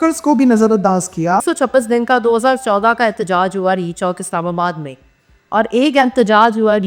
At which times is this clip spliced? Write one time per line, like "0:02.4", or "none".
0:01.4